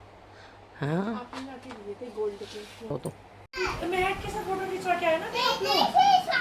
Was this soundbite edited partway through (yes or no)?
yes